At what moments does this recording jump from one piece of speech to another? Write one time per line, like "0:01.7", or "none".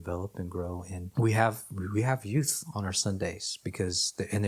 0:01.0